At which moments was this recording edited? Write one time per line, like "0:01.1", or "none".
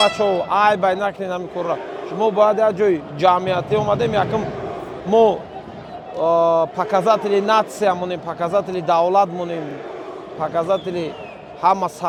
none